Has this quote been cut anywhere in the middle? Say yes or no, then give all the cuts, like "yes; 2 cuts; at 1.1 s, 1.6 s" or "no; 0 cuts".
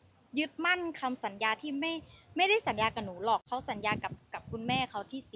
yes; 1 cut; at 3.4 s